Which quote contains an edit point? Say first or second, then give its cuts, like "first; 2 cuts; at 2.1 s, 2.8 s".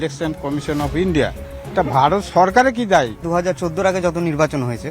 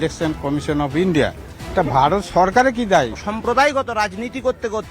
first; 1 cut; at 3.2 s